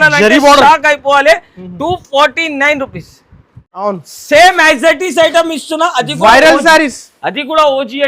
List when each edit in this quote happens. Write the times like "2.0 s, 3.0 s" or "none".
3.8 s